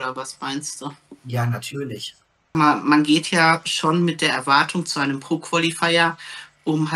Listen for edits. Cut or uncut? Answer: cut